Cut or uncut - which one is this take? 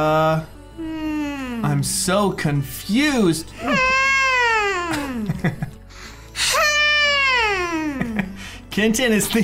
uncut